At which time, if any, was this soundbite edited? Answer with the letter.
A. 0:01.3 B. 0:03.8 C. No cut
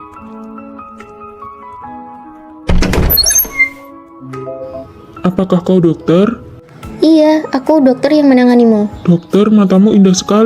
A